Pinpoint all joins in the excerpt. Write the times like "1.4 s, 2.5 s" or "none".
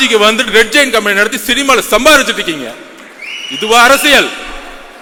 none